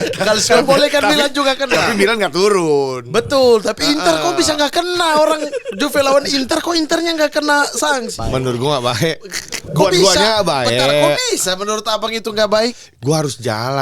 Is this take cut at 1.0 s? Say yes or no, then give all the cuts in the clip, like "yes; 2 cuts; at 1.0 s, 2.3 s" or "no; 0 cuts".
no; 1 cut; at 8.2 s